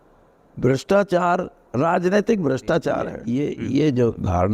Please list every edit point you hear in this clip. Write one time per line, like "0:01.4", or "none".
0:03.2